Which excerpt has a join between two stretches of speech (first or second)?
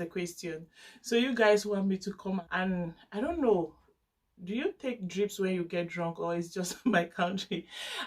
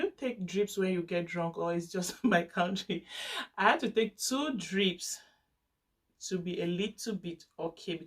first